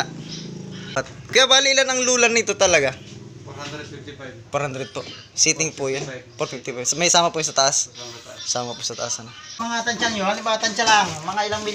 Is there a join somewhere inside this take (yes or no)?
yes